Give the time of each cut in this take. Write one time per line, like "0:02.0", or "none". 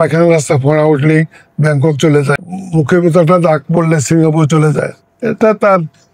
0:02.5